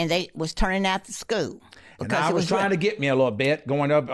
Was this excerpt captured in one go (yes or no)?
yes